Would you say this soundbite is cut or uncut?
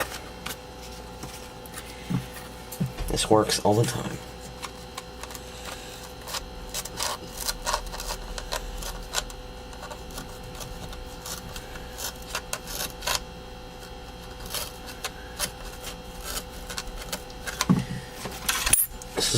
cut